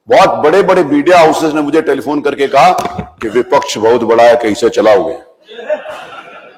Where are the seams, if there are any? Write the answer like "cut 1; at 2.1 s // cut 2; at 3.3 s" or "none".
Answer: none